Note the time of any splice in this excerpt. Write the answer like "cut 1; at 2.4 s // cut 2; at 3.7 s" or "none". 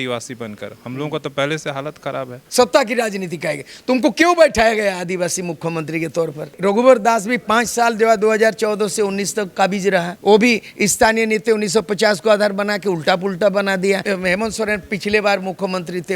cut 1; at 2.4 s // cut 2; at 6.5 s // cut 3; at 14.0 s